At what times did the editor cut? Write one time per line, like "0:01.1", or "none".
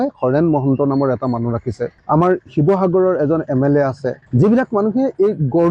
none